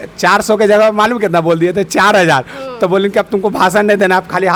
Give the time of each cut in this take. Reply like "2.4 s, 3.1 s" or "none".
none